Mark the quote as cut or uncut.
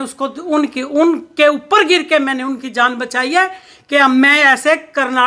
uncut